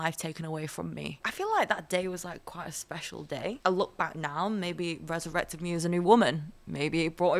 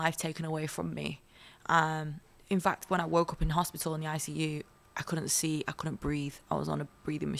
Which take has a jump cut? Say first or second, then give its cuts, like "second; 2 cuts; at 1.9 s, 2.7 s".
first; 2 cuts; at 1.2 s, 3.6 s